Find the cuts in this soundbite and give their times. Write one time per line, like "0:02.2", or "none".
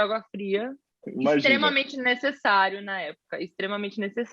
0:01.0